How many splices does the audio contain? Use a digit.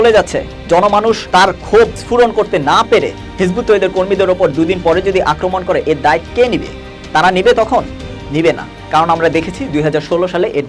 2